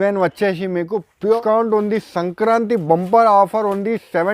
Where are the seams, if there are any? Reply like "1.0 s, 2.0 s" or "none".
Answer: 1.4 s